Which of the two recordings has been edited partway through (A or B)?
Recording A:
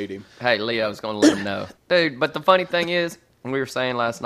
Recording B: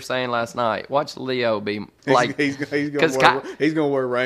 B